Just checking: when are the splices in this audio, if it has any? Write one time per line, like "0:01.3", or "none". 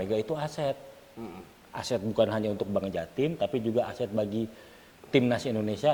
none